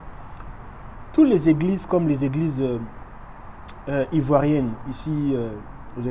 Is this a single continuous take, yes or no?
yes